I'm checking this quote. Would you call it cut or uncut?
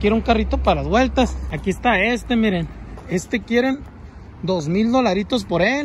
cut